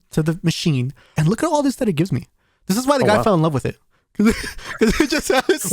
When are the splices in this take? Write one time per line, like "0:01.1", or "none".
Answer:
0:01.1